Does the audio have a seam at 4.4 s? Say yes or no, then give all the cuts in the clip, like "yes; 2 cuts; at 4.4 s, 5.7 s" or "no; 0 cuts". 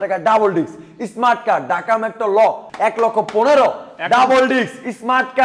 no; 1 cut; at 2.7 s